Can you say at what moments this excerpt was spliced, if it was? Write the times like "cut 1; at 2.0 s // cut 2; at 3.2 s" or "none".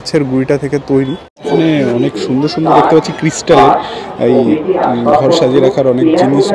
cut 1; at 1.3 s